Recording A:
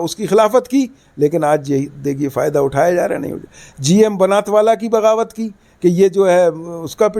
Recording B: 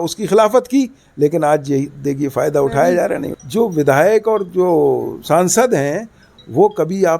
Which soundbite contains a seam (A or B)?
B